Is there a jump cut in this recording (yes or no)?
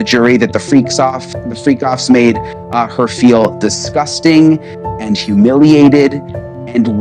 no